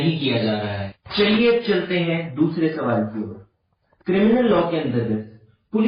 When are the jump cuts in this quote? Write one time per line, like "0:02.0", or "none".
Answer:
none